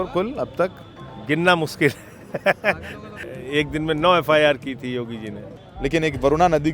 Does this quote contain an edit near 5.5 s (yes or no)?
yes